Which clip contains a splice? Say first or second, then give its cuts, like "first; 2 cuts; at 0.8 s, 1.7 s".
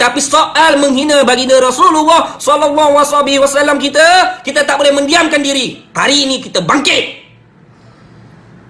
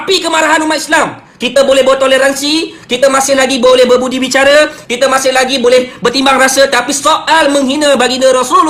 first; 1 cut; at 5.9 s